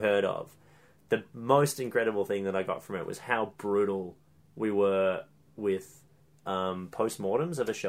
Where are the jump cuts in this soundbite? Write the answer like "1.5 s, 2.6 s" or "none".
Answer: none